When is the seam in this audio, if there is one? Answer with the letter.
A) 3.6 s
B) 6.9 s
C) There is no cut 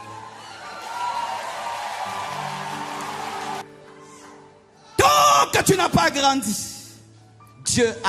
A